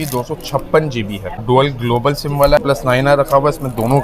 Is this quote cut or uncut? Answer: cut